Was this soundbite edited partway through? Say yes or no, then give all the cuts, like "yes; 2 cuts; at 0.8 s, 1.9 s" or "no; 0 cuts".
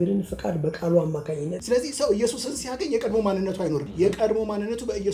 yes; 2 cuts; at 1.6 s, 3.9 s